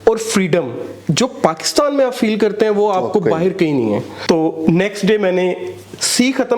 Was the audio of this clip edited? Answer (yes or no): yes